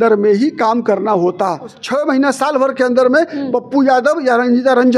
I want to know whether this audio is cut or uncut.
cut